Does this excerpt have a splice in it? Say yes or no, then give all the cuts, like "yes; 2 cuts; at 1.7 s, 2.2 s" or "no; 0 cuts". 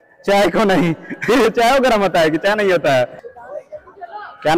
no; 0 cuts